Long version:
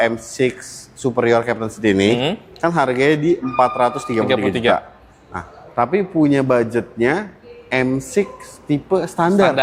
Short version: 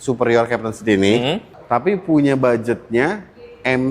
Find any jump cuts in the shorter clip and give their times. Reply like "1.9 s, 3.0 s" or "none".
1.5 s